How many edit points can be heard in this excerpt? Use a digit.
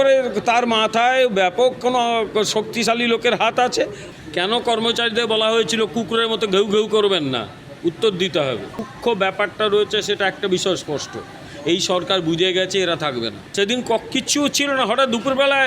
3